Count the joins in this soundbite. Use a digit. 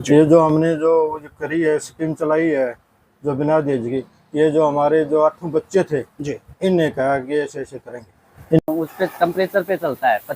1